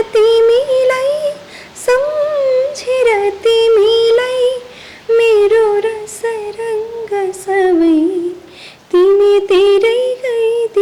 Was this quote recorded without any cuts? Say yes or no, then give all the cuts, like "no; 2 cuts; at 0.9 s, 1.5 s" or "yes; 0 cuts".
yes; 0 cuts